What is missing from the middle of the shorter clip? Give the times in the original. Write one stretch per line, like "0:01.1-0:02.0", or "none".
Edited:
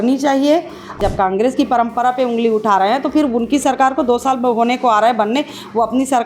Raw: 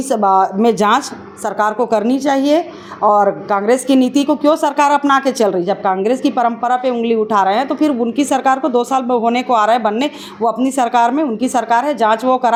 0:03.0-0:05.6